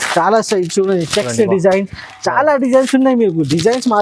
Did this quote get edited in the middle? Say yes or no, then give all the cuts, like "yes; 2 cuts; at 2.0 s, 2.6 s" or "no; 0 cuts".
no; 0 cuts